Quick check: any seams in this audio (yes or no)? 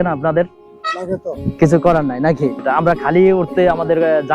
yes